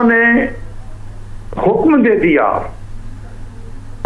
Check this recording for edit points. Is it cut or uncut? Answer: uncut